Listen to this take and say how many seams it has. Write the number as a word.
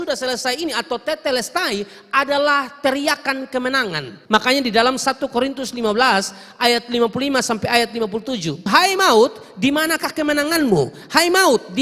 two